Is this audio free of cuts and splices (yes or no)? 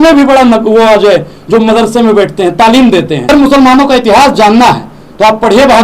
no